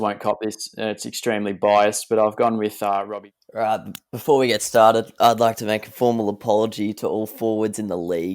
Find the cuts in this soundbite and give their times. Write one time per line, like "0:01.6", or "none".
0:03.1